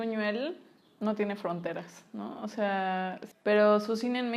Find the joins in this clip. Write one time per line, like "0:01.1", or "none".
0:03.2